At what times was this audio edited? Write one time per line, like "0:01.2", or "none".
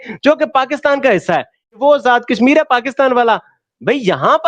0:01.8